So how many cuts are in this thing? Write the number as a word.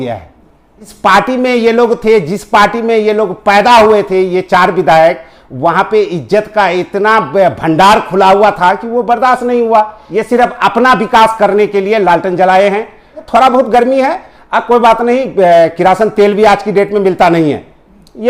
three